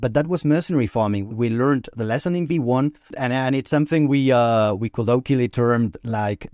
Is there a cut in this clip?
yes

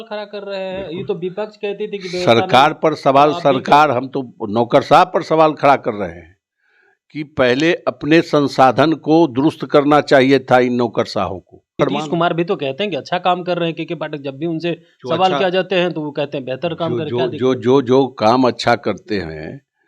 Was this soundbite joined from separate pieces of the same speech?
yes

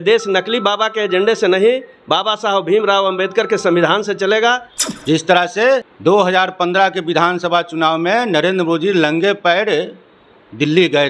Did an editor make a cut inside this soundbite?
yes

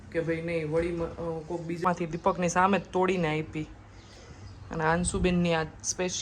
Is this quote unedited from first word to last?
no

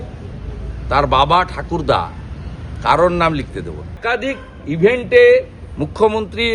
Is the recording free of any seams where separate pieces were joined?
no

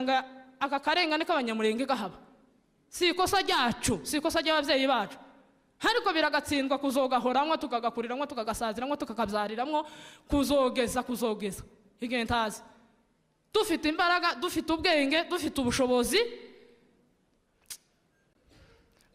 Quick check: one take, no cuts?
yes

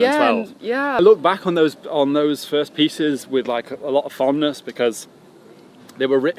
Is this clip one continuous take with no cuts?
no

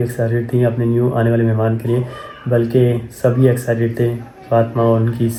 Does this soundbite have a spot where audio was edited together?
no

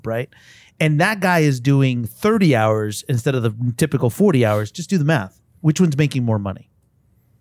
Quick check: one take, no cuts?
yes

